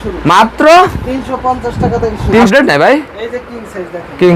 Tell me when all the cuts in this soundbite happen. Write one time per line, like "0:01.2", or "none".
0:02.5